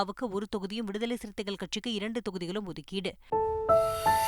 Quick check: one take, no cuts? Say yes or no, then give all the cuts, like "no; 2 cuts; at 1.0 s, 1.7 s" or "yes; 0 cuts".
no; 1 cut; at 3.1 s